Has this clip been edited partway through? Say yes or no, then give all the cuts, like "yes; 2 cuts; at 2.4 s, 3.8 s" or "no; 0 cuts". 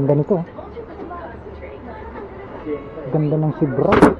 yes; 1 cut; at 2.8 s